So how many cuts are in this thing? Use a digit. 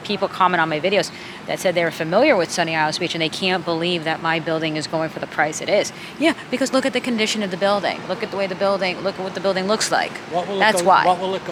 0